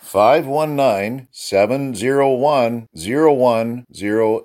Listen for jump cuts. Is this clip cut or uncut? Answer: uncut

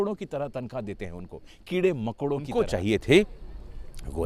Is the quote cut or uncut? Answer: cut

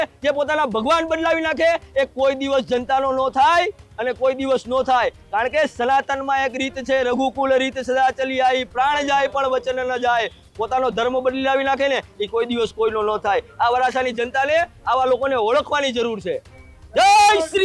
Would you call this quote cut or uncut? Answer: uncut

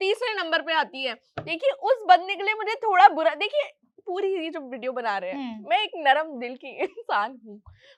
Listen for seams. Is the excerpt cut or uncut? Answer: uncut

